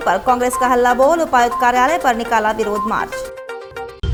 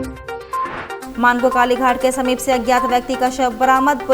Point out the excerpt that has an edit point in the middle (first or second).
second